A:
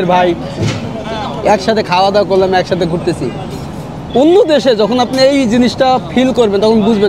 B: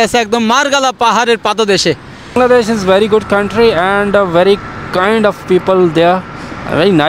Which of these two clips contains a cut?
B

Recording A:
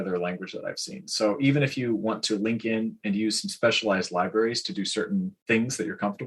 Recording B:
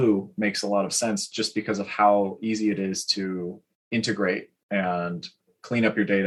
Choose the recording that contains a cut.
A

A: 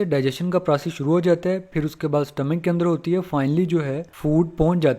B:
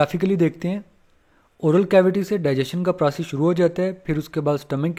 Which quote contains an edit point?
A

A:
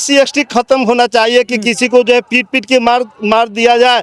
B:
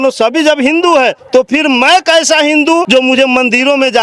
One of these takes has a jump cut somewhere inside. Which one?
B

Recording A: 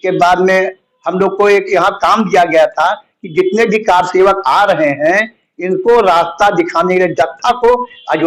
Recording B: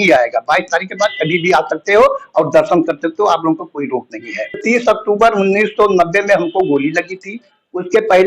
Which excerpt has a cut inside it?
B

